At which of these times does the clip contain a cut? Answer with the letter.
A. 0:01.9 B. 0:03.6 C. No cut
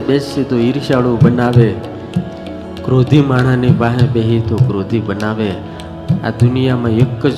C